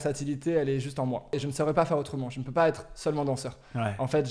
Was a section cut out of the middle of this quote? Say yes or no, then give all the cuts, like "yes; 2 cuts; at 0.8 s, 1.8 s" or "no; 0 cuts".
yes; 1 cut; at 1.3 s